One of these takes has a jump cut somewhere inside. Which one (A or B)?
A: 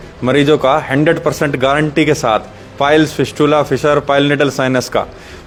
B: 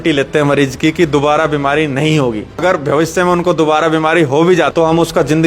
B